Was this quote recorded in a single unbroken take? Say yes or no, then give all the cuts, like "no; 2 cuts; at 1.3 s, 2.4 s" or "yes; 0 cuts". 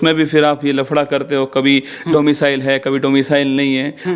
yes; 0 cuts